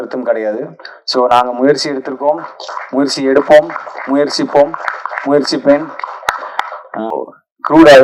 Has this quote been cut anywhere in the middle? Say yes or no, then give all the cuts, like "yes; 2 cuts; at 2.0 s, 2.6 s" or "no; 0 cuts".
yes; 1 cut; at 7.1 s